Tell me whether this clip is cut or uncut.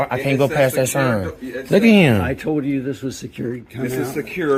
uncut